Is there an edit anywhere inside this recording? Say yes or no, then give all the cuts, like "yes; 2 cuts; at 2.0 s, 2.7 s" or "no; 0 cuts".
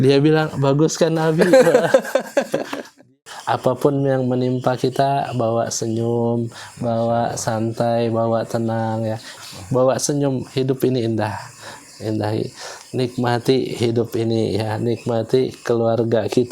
yes; 2 cuts; at 3.0 s, 9.3 s